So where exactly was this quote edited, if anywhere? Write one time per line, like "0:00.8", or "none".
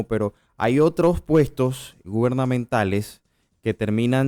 none